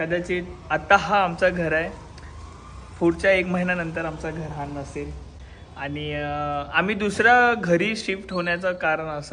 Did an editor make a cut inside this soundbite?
no; 0 cuts

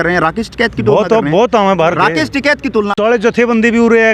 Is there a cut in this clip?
yes; 1 cut; at 2.9 s

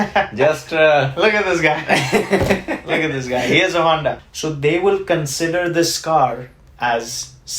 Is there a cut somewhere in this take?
yes; 1 cut; at 4.2 s

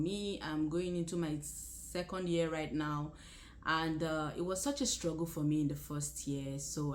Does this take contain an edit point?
no; 0 cuts

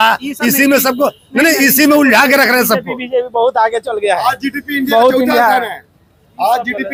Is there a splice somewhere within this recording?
no; 0 cuts

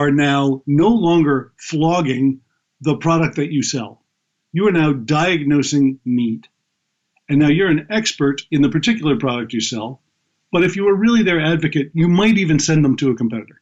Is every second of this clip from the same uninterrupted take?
yes; 0 cuts

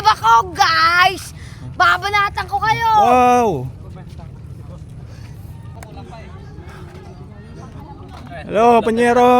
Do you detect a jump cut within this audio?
yes; 1 cut; at 5.8 s

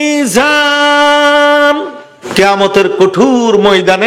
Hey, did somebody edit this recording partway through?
yes; 1 cut; at 2.1 s

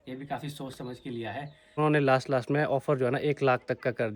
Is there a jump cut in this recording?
yes; 1 cut; at 1.8 s

